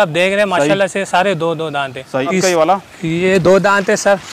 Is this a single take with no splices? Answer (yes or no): no